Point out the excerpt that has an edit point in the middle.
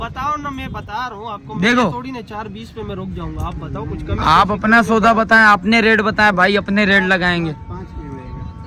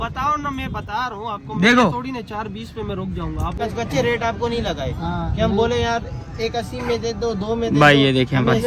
second; 1 cut; at 3.6 s

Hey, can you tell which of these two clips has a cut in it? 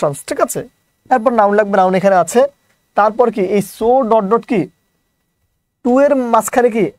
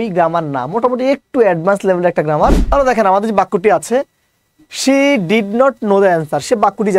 second; 1 cut; at 2.6 s

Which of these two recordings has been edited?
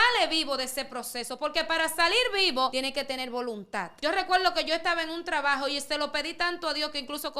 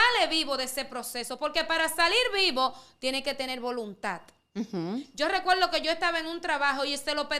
first; 2 cuts; at 2.7 s, 3.9 s

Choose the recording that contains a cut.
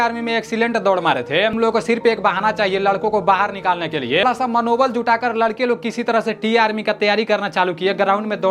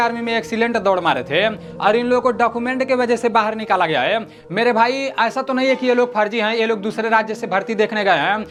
first; 2 cuts; at 1.6 s, 4.2 s

